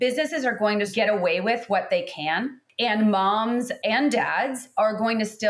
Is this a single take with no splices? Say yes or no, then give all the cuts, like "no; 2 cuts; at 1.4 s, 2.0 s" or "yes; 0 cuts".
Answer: no; 3 cuts; at 0.9 s, 2.6 s, 3.7 s